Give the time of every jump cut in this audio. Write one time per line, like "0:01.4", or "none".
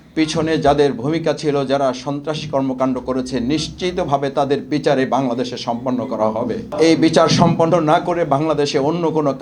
0:06.7